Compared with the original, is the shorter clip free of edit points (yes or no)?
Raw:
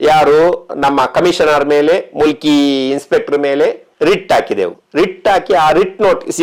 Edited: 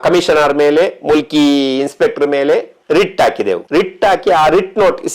no